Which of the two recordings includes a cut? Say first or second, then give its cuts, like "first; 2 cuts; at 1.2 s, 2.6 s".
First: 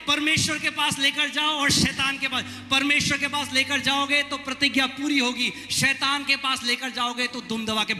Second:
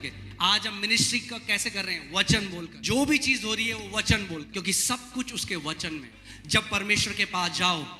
second; 3 cuts; at 2.7 s, 4.5 s, 6.2 s